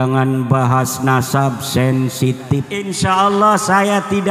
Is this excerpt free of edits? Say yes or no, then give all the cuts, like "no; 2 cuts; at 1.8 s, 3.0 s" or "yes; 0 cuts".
no; 1 cut; at 2.8 s